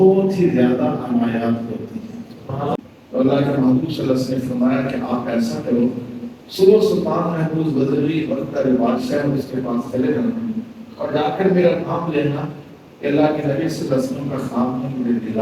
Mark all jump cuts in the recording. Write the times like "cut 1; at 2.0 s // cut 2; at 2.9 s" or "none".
cut 1; at 2.8 s